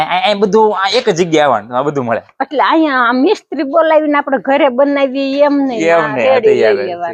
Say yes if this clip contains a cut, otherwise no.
no